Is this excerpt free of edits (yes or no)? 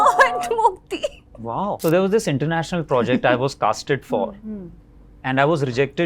no